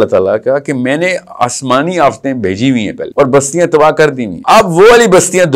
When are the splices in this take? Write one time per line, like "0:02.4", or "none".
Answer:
0:03.0
0:04.3